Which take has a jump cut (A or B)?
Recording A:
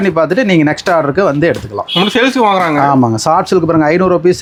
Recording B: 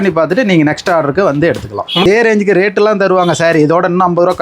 B